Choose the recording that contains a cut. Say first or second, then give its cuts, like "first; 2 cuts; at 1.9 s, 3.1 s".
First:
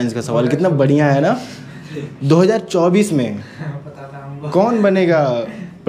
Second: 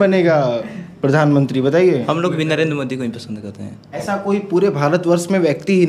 second; 2 cuts; at 2.0 s, 3.9 s